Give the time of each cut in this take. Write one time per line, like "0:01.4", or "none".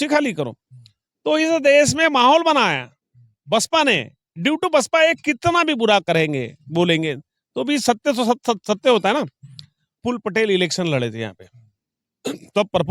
0:10.0